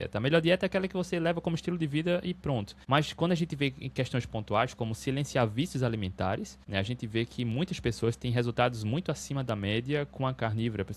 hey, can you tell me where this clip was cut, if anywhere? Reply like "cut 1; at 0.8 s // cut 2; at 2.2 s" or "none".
cut 1; at 2.7 s // cut 2; at 6.6 s

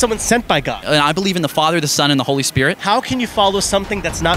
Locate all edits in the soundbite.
cut 1; at 0.9 s // cut 2; at 2.8 s

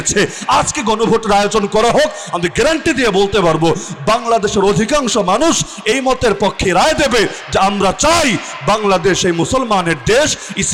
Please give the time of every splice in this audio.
none

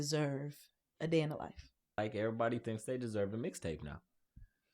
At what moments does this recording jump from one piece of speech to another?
cut 1; at 2.0 s

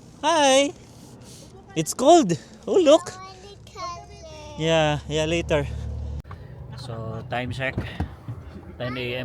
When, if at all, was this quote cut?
cut 1; at 6.3 s

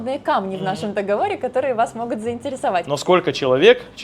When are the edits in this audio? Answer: cut 1; at 2.9 s

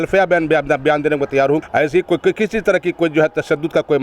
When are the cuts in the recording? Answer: cut 1; at 1.6 s

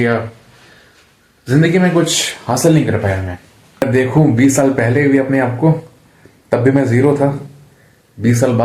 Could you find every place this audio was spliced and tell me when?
cut 1; at 3.8 s

